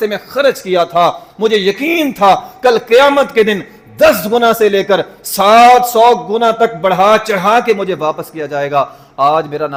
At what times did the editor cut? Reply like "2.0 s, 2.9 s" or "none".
none